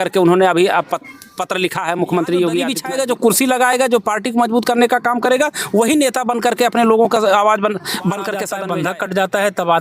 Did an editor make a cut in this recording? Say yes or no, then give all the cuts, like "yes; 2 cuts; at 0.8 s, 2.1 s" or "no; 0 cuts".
yes; 2 cuts; at 2.8 s, 8.5 s